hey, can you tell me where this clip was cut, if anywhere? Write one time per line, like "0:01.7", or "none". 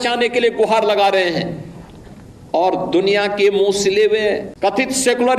0:04.5